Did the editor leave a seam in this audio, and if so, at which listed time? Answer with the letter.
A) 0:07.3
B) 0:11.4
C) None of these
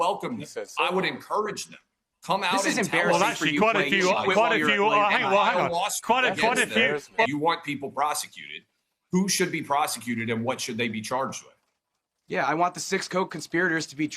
A